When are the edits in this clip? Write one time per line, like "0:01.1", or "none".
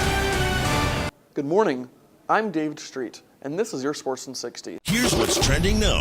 0:04.7